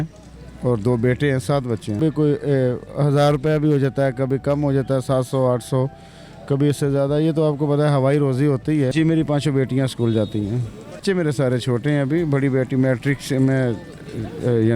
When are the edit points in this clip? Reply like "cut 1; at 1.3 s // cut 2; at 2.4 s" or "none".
cut 1; at 2.0 s // cut 2; at 8.9 s // cut 3; at 11.0 s